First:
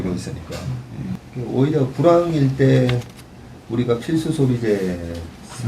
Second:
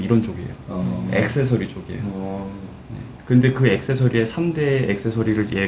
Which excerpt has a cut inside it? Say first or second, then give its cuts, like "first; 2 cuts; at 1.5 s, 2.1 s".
first; 1 cut; at 1.2 s